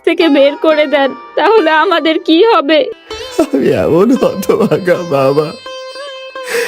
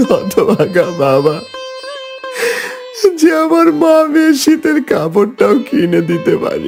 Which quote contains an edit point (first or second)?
first